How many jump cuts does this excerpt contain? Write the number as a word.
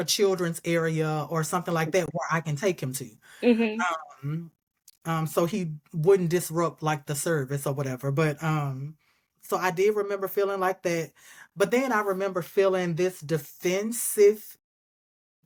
zero